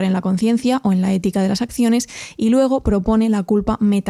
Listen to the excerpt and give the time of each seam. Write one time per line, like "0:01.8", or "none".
none